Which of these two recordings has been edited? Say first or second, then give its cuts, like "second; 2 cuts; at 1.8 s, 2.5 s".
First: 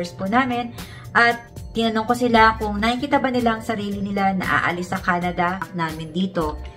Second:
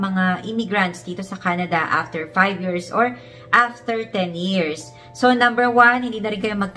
first; 1 cut; at 5.7 s